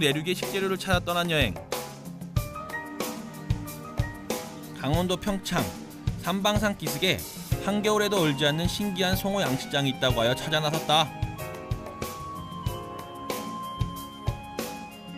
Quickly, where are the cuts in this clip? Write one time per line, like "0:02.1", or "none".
0:12.6

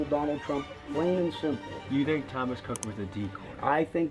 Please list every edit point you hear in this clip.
0:02.1

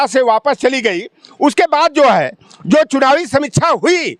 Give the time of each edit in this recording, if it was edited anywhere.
none

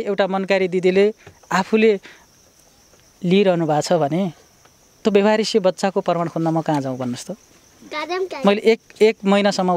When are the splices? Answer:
none

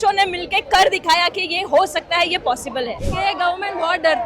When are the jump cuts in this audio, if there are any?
0:03.0

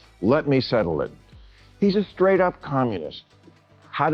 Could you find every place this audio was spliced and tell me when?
none

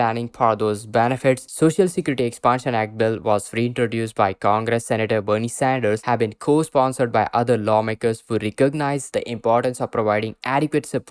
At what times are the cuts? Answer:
0:01.5

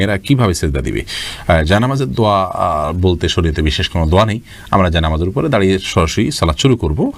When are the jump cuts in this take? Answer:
none

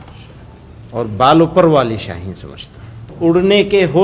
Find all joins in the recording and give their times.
0:03.1

